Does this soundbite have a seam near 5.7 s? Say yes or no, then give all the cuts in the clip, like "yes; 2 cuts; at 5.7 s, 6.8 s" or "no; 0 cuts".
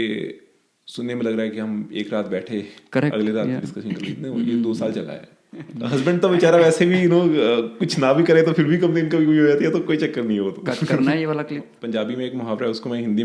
yes; 2 cuts; at 5.7 s, 11.7 s